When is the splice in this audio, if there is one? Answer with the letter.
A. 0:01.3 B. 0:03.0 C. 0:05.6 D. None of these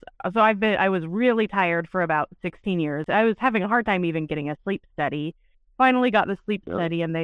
B